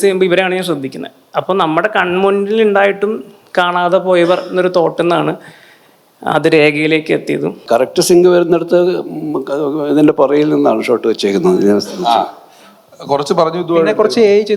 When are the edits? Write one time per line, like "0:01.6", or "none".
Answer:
0:07.6